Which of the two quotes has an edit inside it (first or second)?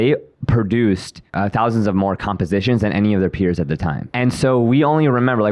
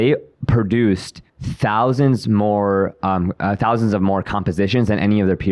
first